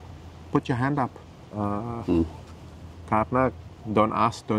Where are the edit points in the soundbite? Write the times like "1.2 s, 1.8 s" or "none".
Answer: none